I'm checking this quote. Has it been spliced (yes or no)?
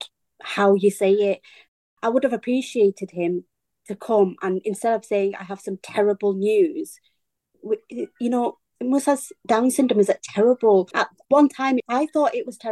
yes